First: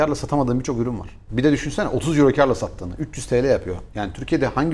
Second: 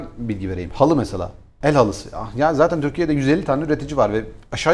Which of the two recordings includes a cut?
first; 1 cut; at 1.1 s

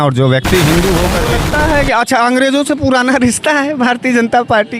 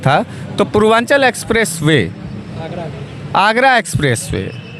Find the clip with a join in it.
first; 1 cut; at 1.3 s

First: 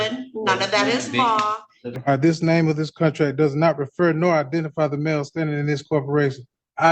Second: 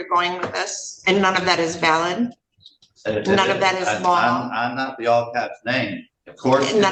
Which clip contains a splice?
first; 1 cut; at 1.9 s

